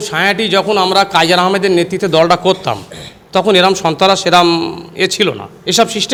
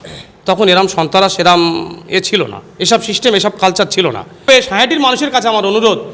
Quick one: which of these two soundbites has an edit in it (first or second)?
second